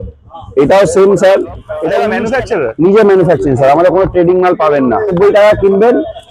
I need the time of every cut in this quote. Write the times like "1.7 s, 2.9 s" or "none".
2.1 s, 5.1 s